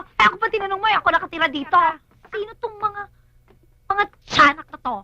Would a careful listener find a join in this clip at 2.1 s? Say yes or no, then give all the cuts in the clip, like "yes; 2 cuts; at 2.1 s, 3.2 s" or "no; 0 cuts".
yes; 1 cut; at 2.1 s